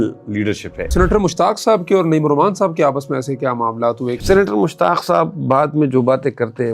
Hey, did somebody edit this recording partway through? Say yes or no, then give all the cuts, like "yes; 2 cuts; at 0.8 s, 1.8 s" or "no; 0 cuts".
yes; 2 cuts; at 0.9 s, 4.2 s